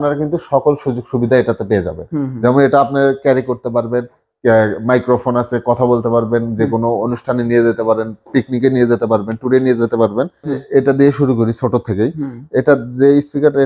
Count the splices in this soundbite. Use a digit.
1